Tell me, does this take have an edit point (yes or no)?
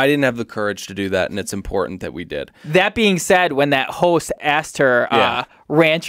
yes